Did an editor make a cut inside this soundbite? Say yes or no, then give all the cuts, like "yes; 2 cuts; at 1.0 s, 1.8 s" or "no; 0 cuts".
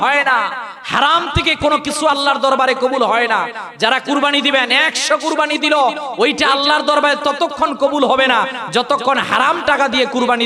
no; 0 cuts